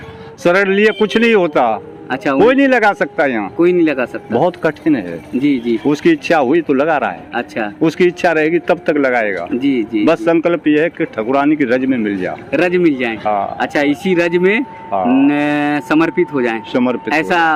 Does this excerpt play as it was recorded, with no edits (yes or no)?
yes